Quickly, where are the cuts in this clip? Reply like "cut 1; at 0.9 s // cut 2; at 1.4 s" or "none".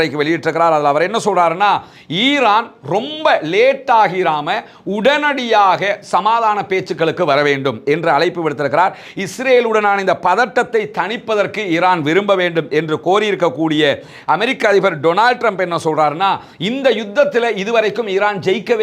none